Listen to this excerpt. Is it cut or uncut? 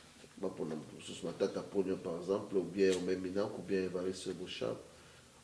uncut